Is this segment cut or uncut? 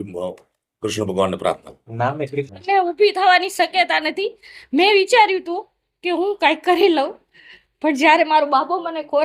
uncut